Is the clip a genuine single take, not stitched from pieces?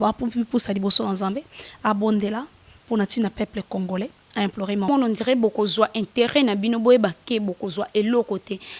no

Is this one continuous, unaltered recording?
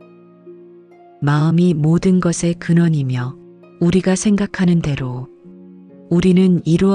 no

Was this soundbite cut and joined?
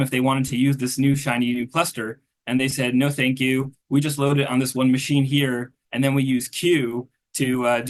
no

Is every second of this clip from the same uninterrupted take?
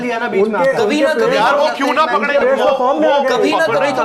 yes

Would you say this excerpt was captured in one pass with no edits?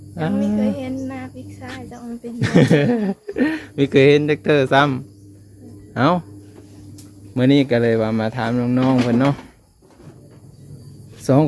yes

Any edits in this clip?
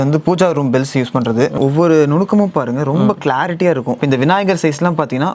yes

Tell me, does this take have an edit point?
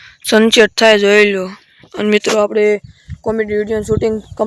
no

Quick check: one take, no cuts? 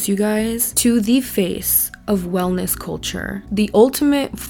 yes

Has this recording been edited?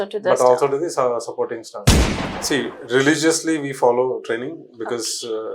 yes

